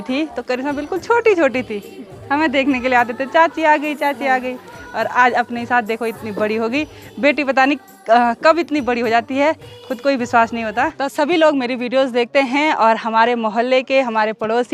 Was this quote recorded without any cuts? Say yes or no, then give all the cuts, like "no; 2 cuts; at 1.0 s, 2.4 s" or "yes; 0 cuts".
yes; 0 cuts